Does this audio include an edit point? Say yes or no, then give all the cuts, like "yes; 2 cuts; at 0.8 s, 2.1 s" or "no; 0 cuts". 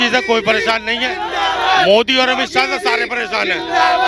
no; 0 cuts